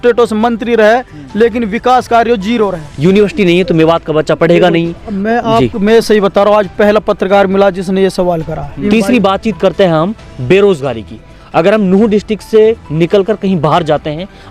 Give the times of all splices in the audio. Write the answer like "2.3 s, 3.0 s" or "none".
2.8 s, 8.8 s